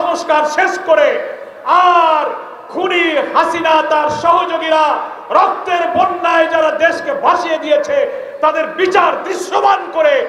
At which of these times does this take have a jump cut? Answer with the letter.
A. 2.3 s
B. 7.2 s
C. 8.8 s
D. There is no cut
D